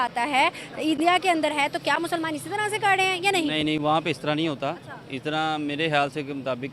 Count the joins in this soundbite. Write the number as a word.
zero